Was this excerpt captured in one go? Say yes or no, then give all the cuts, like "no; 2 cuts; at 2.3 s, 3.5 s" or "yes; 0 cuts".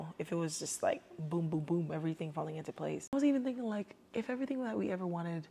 no; 1 cut; at 3.1 s